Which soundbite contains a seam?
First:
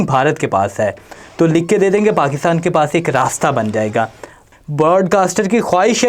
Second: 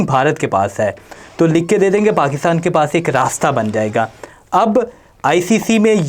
first; 1 cut; at 4.4 s

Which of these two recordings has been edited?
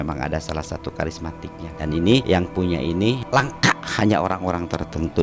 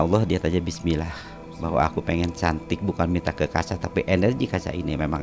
first; 3 cuts; at 1.7 s, 2.2 s, 3.2 s

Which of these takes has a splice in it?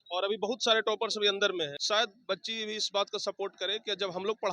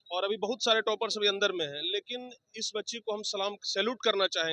first; 1 cut; at 1.8 s

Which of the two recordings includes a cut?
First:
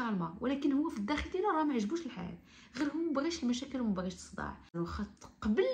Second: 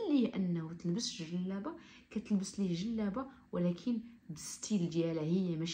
first; 1 cut; at 4.7 s

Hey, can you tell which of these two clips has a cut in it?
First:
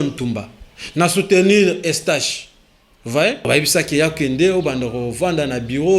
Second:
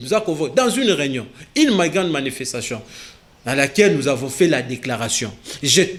first; 1 cut; at 3.5 s

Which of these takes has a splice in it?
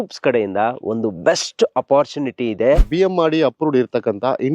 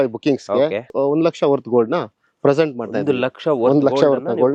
first; 1 cut; at 2.9 s

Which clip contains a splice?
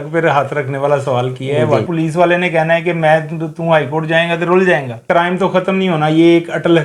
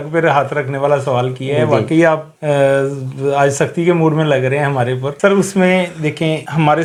first; 2 cuts; at 1.9 s, 5.0 s

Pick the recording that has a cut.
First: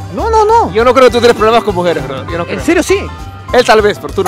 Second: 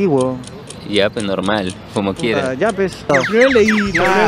second; 1 cut; at 3.0 s

